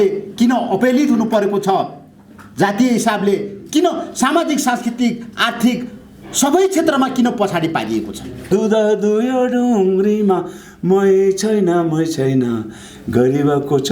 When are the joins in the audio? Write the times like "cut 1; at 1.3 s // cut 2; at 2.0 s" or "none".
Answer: cut 1; at 8.5 s